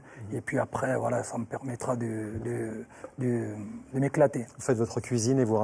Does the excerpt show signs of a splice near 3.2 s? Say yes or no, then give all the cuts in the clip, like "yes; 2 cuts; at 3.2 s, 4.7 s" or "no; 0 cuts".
no; 0 cuts